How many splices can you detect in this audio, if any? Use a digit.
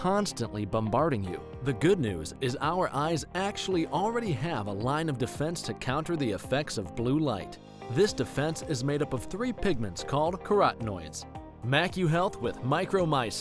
0